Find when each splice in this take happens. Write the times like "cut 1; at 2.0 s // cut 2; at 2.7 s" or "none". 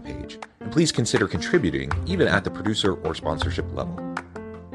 none